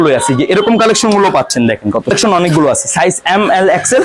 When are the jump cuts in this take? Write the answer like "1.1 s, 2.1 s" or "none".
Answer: 2.1 s